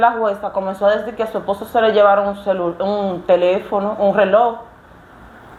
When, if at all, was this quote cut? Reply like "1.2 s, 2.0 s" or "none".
none